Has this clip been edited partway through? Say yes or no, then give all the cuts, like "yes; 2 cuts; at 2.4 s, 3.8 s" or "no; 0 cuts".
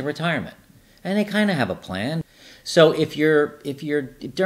yes; 1 cut; at 2.2 s